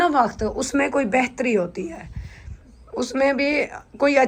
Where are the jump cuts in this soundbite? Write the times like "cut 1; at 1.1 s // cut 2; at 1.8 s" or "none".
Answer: none